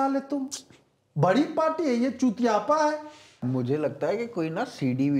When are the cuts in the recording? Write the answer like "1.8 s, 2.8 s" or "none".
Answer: 3.4 s